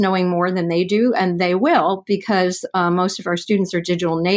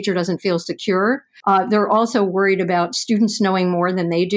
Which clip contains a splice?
second; 1 cut; at 1.3 s

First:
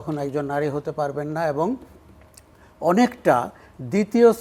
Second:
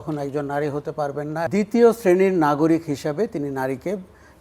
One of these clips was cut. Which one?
second; 1 cut; at 1.5 s

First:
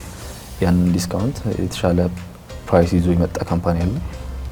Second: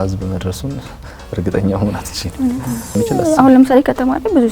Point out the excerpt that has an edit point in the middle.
second; 1 cut; at 2.9 s

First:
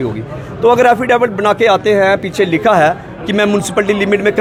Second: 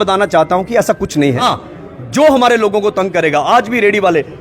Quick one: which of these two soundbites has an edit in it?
second; 1 cut; at 1.6 s

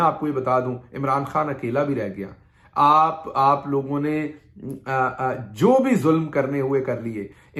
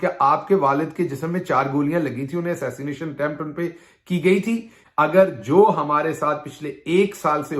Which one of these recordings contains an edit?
second; 1 cut; at 4.7 s

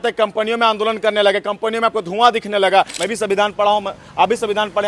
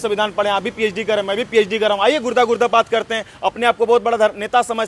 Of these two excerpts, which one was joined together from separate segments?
first; 1 cut; at 3.0 s

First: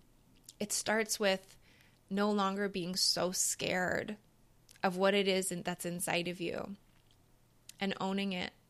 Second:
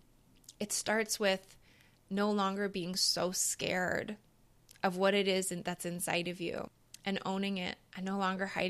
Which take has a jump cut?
second; 2 cuts; at 6.8 s, 7.8 s

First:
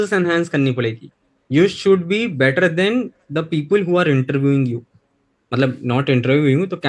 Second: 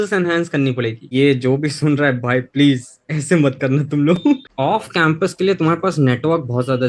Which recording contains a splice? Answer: second; 2 cuts; at 1.1 s, 4.5 s

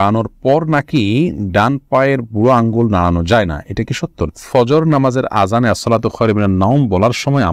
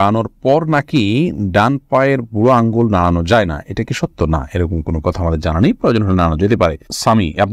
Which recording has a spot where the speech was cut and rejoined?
first; 1 cut; at 4.3 s

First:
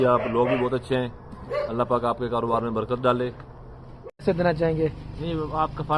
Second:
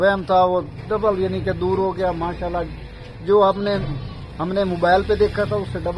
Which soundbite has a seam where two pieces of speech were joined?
first; 1 cut; at 4.2 s

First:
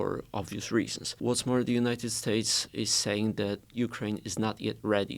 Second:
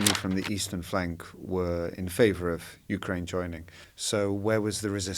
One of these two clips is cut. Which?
first; 3 cuts; at 1.2 s, 2.6 s, 3.7 s

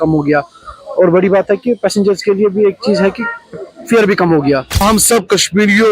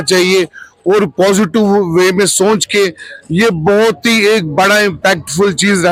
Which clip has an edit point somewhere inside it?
first; 1 cut; at 4.8 s

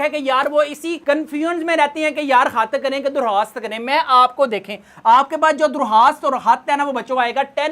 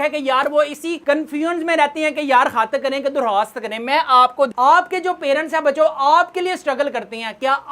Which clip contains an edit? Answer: second; 1 cut; at 4.5 s

